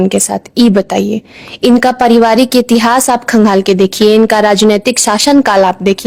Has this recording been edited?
no; 0 cuts

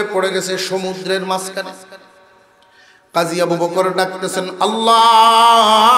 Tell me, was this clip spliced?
no; 0 cuts

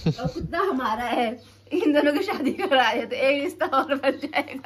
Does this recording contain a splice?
no; 0 cuts

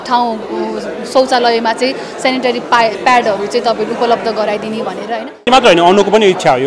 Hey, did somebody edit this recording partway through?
yes; 1 cut; at 5.5 s

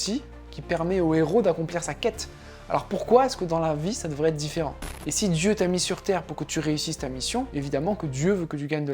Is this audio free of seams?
no; 2 cuts; at 4.9 s, 7.5 s

